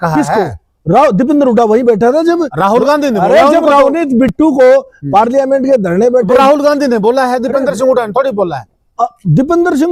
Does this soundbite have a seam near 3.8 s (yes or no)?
no